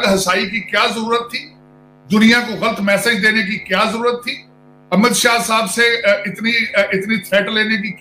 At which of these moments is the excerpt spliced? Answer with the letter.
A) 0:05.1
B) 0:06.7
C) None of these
C